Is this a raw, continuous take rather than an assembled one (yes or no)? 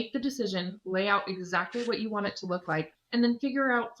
no